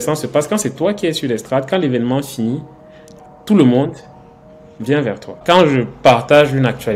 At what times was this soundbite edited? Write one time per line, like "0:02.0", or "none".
0:05.4

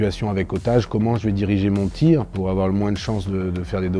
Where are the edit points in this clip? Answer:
none

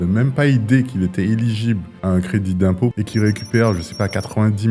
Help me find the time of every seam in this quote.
0:01.9
0:03.0

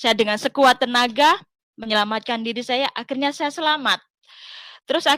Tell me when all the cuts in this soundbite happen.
none

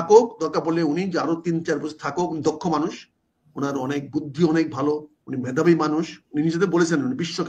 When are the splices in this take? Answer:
none

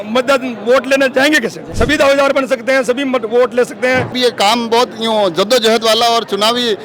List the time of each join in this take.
0:01.6
0:04.1

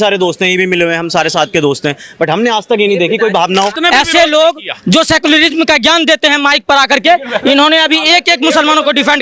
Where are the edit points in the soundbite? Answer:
0:03.8

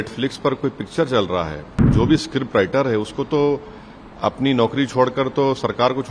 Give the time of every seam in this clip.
0:01.9

